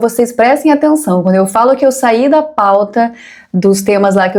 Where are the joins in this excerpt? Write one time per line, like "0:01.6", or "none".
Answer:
none